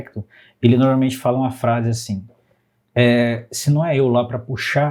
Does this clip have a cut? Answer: no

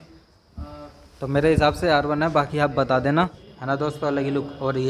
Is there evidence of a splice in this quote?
yes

